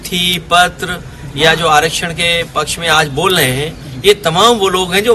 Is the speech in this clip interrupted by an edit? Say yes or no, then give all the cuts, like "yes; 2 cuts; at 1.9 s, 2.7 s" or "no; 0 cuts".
no; 0 cuts